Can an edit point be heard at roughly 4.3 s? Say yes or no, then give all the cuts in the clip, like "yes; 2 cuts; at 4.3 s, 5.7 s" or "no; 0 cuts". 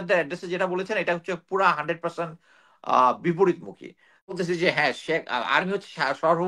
yes; 1 cut; at 4.3 s